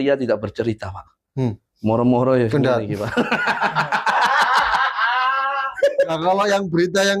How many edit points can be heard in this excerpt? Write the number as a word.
one